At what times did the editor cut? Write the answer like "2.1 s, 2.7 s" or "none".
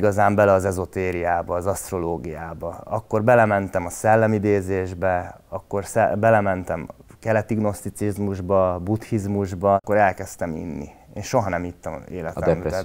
9.8 s

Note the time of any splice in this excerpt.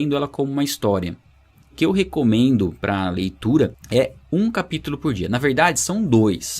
3.8 s

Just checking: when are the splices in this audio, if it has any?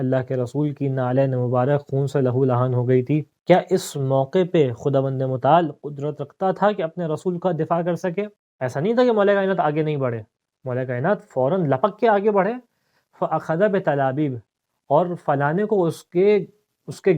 8.3 s

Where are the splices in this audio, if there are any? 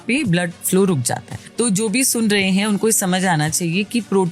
1.4 s

